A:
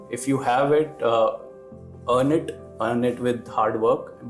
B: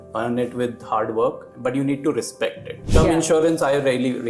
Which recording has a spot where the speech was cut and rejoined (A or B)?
B